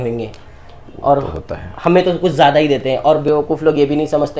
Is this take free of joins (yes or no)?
yes